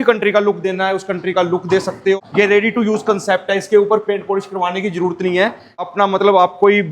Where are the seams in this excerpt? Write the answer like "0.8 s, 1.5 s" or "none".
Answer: 2.2 s, 5.8 s